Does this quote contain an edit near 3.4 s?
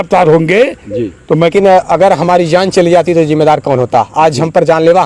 no; 1 cut; at 1.5 s

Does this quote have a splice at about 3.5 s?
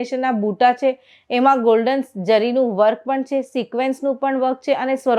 no; 0 cuts

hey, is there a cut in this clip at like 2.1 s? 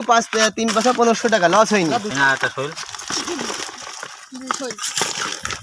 yes; 1 cut; at 2.1 s

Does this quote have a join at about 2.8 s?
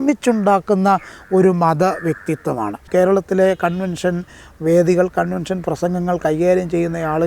yes; 1 cut; at 2.8 s

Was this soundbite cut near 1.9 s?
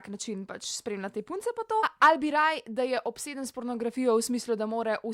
yes; 1 cut; at 1.9 s

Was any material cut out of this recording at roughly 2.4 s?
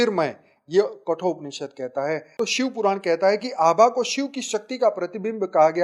yes; 1 cut; at 2.4 s

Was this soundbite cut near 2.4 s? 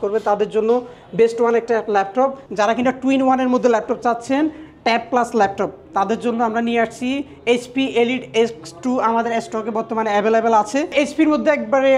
yes; 2 cuts; at 2.4 s, 10.9 s

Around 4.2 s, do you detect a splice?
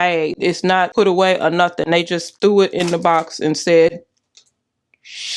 no; 2 cuts; at 0.9 s, 2.2 s

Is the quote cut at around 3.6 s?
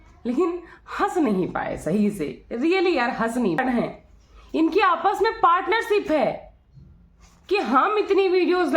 yes; 1 cut; at 3.6 s

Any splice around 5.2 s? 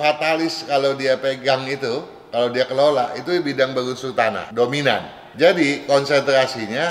yes; 2 cuts; at 4.4 s, 5.2 s

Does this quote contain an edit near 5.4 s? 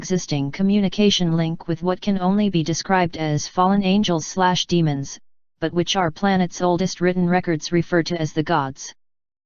no; 1 cut; at 1.2 s

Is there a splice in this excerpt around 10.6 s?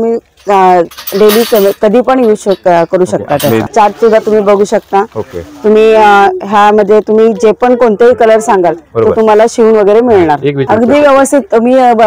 yes; 2 cuts; at 3.7 s, 10.6 s

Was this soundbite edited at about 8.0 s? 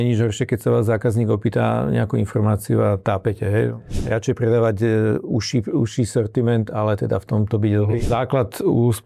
yes; 2 cuts; at 3.9 s, 8.0 s

